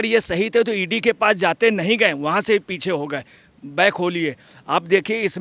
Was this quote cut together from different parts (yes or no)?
no